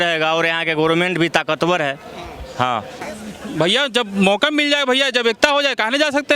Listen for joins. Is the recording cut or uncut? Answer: cut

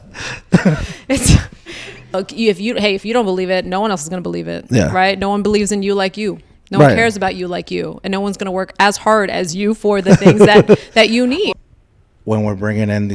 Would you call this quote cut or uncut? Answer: cut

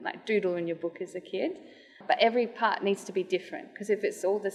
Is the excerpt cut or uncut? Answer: uncut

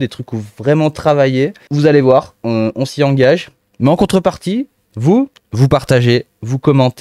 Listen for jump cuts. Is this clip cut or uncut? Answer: cut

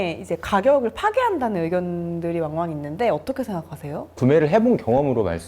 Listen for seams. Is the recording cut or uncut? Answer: cut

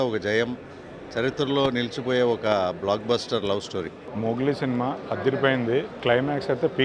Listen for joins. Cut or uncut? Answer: cut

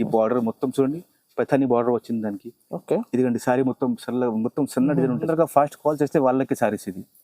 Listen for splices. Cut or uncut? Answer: cut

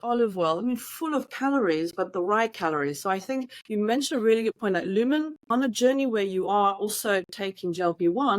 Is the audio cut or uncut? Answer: cut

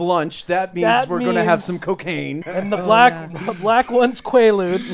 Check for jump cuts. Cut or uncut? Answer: cut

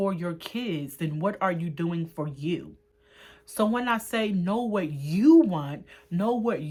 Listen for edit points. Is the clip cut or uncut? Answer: uncut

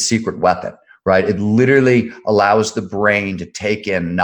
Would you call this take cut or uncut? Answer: uncut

